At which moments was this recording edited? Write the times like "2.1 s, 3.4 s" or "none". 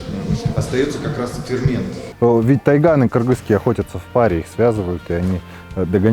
2.0 s